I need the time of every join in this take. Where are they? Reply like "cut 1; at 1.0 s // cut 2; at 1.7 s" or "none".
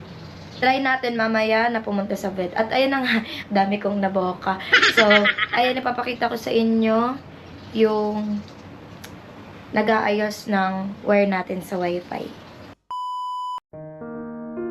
none